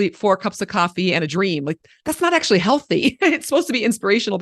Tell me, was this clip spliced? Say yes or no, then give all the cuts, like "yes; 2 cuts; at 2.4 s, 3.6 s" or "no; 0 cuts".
no; 0 cuts